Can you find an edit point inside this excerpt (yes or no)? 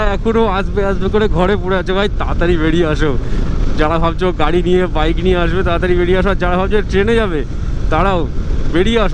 no